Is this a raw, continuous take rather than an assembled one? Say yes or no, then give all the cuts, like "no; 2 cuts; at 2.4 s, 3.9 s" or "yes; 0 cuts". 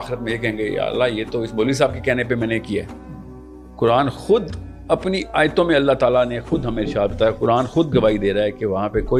yes; 0 cuts